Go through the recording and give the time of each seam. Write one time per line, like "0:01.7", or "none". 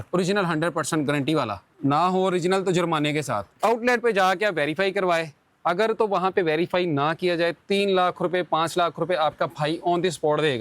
0:01.6
0:03.6